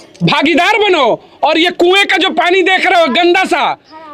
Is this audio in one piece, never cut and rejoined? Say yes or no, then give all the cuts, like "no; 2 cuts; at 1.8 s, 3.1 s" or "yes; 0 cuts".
yes; 0 cuts